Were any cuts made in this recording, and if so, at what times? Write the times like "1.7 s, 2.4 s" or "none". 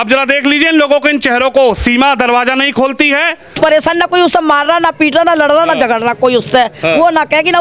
3.6 s